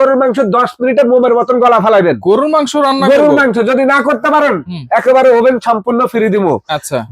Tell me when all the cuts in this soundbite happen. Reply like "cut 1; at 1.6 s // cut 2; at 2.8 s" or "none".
none